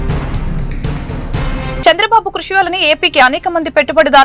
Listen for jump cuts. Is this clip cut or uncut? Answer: cut